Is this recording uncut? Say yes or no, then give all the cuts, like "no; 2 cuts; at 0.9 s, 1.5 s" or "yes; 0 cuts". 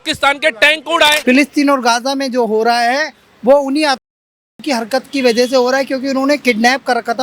no; 1 cut; at 1.2 s